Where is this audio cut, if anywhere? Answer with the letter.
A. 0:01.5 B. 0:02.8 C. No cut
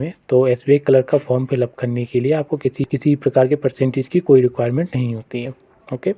B